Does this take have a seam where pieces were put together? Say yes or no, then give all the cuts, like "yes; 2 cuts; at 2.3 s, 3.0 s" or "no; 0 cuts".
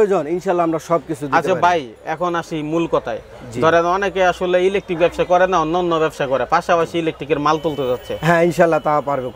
no; 0 cuts